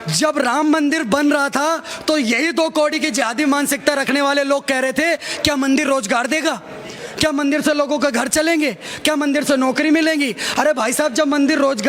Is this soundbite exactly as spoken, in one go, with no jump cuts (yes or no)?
yes